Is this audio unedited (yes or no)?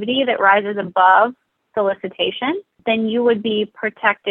no